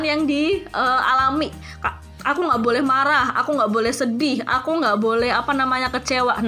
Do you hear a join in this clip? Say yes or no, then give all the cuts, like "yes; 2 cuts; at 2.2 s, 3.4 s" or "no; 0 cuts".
no; 0 cuts